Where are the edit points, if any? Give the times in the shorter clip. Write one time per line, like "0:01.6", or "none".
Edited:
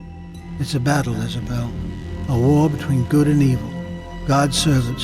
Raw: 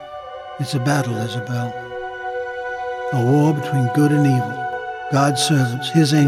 0:02.3